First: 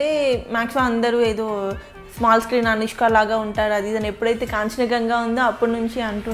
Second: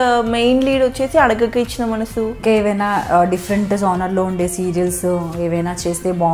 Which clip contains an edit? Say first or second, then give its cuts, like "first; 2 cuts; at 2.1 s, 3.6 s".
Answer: second; 1 cut; at 2.4 s